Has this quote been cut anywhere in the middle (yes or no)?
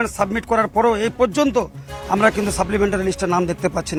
no